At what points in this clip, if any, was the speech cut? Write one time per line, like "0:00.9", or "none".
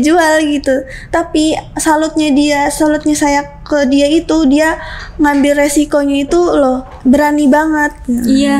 none